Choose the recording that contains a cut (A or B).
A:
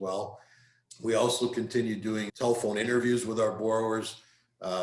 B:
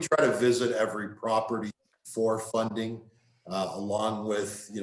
A